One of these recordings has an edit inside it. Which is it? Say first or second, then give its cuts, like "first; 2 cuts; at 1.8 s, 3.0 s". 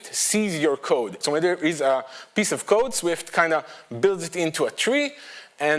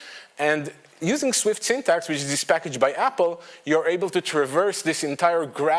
first; 1 cut; at 1.2 s